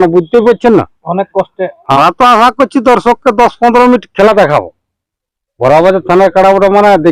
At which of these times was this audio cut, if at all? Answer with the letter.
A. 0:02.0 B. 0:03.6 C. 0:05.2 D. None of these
A